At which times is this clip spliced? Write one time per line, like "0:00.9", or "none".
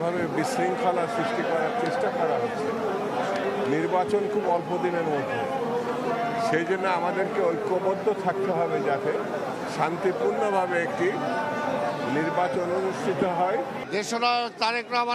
none